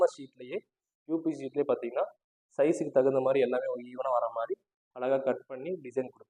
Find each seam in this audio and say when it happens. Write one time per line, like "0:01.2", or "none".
none